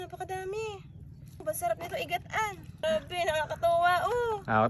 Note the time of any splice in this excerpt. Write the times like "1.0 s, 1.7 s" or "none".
1.4 s, 2.8 s